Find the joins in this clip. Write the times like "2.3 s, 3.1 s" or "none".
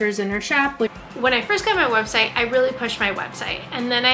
1.0 s